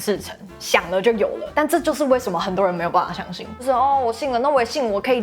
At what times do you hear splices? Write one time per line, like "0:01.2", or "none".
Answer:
0:01.4
0:03.6